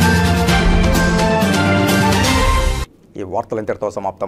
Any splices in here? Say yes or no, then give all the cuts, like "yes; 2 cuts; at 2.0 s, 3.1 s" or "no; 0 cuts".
no; 0 cuts